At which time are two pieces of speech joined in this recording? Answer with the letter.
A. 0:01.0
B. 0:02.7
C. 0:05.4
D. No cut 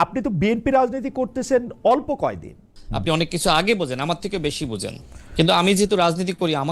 B